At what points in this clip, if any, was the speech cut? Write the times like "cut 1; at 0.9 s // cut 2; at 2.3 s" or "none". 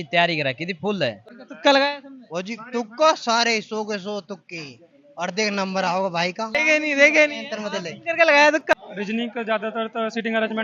cut 1; at 1.3 s // cut 2; at 6.5 s // cut 3; at 8.7 s